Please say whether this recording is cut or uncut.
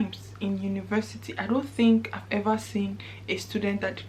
uncut